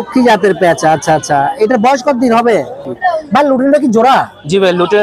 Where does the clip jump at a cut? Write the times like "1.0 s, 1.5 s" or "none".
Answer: 2.9 s